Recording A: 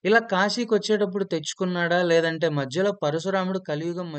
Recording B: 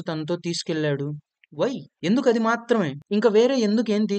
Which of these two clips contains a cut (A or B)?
B